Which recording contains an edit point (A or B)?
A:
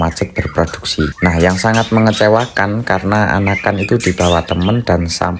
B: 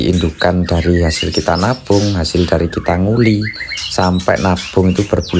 A